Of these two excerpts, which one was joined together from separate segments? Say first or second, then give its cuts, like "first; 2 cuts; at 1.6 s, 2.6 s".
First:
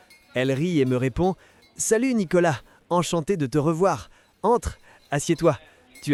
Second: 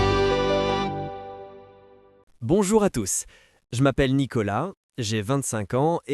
second; 1 cut; at 1.9 s